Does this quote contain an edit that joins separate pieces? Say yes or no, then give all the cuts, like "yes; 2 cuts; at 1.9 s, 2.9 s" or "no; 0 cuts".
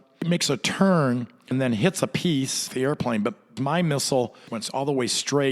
yes; 4 cuts; at 1.5 s, 2.7 s, 3.6 s, 4.5 s